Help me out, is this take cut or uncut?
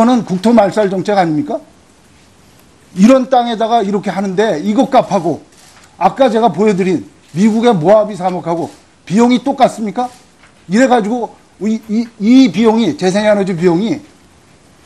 uncut